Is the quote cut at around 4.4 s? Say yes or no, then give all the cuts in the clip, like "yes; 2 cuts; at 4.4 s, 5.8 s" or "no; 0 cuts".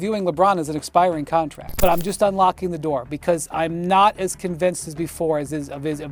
no; 1 cut; at 1.6 s